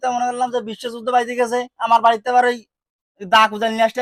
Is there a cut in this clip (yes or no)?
no